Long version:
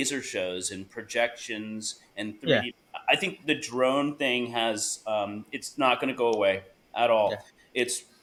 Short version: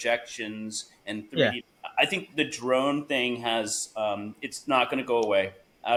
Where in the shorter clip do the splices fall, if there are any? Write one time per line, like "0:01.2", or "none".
none